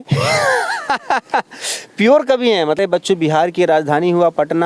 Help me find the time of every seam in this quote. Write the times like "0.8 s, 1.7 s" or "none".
2.8 s